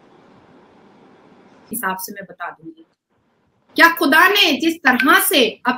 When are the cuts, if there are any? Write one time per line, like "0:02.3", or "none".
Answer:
0:01.7